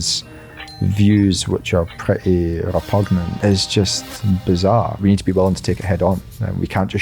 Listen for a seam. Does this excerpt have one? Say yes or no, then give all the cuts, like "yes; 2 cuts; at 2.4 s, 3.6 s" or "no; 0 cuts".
yes; 2 cuts; at 3.3 s, 4.9 s